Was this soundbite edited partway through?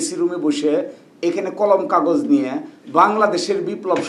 no; 0 cuts

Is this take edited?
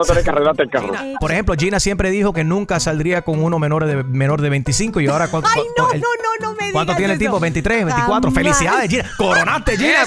yes; 1 cut; at 1.1 s

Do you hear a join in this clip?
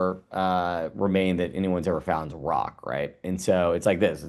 no; 0 cuts

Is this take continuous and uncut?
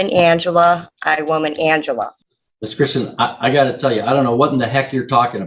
no; 1 cut; at 2.1 s

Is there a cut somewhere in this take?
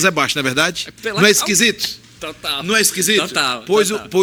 no; 0 cuts

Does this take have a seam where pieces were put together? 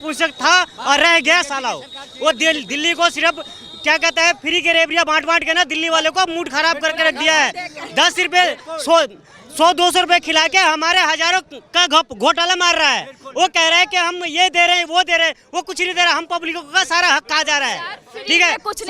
no; 0 cuts

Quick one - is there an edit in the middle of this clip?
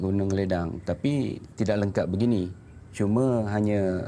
no; 0 cuts

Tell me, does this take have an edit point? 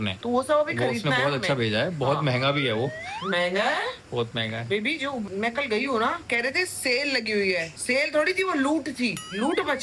yes; 2 cuts; at 3.0 s, 5.3 s

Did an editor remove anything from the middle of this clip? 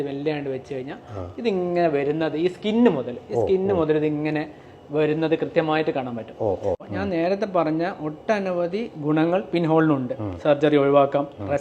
yes; 1 cut; at 6.8 s

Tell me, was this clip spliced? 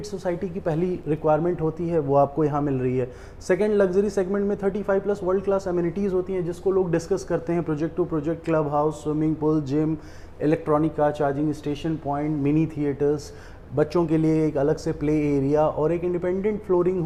no; 0 cuts

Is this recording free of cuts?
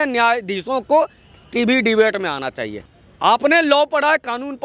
no; 1 cut; at 2.8 s

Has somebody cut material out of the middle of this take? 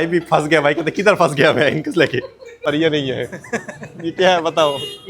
yes; 1 cut; at 2.5 s

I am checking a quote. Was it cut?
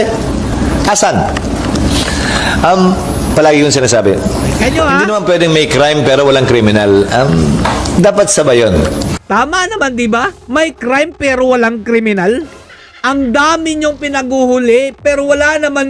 no; 0 cuts

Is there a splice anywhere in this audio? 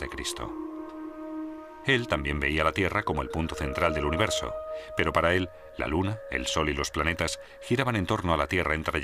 yes; 1 cut; at 2.3 s

